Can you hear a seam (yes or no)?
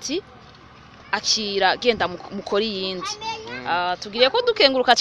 no